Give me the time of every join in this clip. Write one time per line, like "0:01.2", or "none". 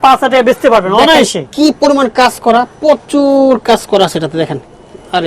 none